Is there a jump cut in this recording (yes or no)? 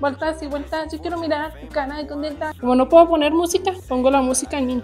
yes